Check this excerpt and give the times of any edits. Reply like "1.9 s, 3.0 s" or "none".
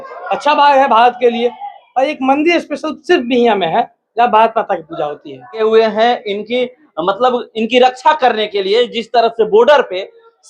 5.6 s